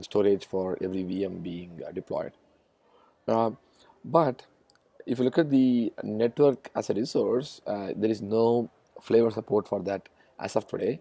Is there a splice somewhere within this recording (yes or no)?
yes